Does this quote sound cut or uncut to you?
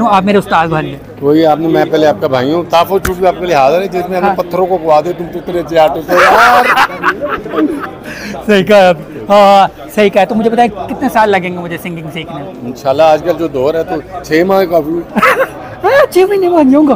uncut